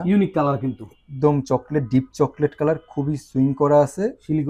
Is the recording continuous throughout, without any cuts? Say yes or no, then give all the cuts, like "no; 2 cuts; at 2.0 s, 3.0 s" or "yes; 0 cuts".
yes; 0 cuts